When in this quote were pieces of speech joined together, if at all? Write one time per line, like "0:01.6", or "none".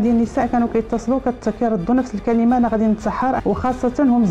0:03.4

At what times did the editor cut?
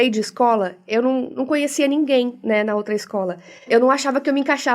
0:03.7

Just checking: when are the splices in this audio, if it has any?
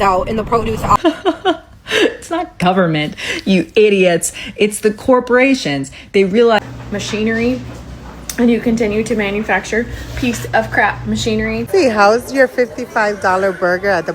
0:01.0
0:06.6
0:11.6

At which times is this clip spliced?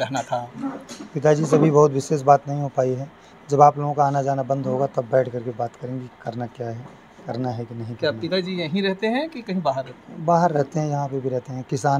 none

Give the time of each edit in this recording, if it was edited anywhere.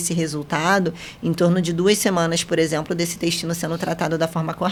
none

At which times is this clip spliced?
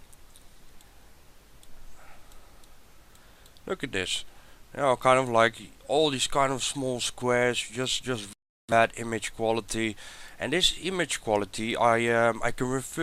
0:04.5

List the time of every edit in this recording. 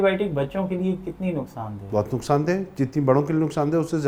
none

